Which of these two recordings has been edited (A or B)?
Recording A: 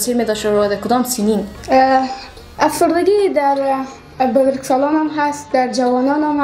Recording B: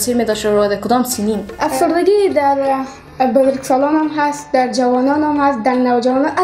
B